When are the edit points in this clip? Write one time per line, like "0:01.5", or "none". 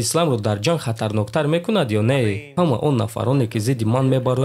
0:02.5